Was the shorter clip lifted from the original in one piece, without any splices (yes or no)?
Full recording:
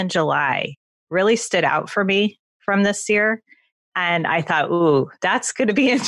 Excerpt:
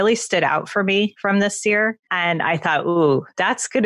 no